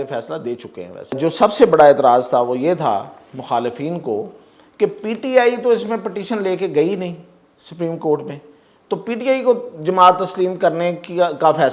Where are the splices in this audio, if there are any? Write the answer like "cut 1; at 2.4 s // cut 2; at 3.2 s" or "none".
cut 1; at 1.2 s